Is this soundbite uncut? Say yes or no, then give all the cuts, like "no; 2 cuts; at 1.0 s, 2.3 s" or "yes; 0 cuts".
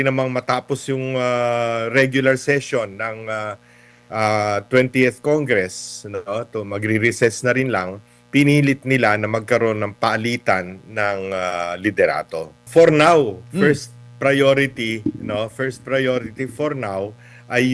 no; 1 cut; at 12.6 s